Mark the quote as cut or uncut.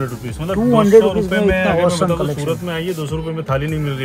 uncut